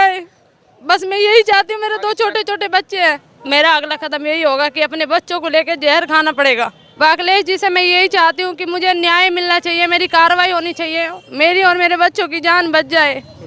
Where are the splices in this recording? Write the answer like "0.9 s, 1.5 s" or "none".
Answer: 3.3 s, 6.8 s

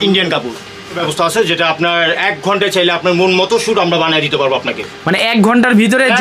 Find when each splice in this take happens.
1.0 s

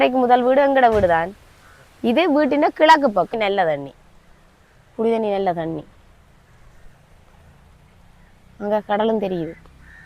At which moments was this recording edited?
3.4 s

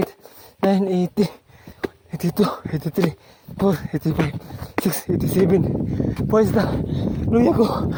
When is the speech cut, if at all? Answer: none

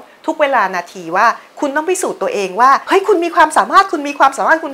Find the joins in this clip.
2.8 s

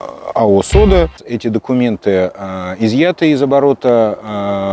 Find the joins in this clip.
1.3 s

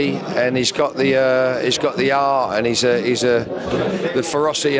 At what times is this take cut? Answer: none

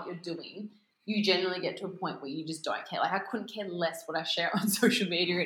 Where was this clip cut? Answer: none

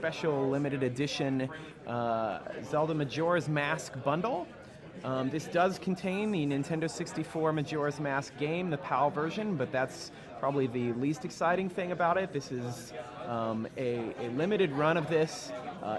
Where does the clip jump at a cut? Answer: 13.7 s

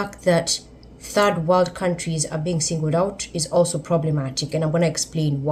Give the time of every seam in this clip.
none

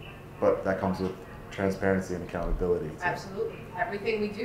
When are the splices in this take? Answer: none

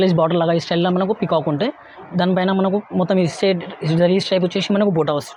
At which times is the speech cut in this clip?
none

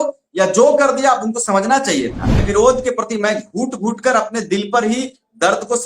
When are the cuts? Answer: 2.4 s

